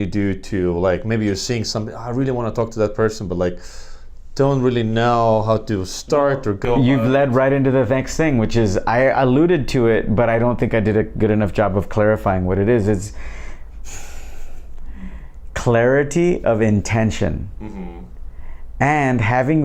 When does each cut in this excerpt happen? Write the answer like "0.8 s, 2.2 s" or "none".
none